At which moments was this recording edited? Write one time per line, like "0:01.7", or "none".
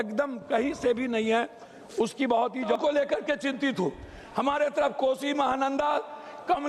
0:02.7